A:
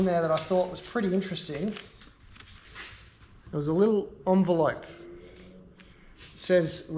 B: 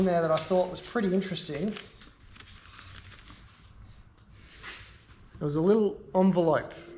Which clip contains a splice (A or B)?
A